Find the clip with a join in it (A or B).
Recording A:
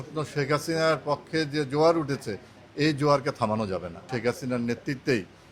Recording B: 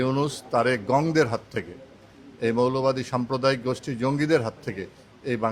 A